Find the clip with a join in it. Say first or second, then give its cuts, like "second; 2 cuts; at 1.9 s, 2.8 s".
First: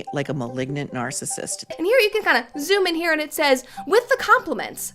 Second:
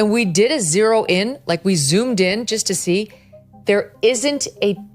first; 1 cut; at 1.6 s